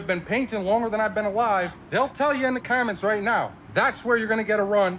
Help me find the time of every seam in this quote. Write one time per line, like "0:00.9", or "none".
0:01.8
0:03.6